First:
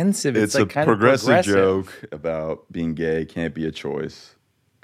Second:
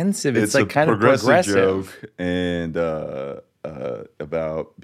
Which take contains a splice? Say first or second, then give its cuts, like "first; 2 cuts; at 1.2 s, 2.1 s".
first; 1 cut; at 2.0 s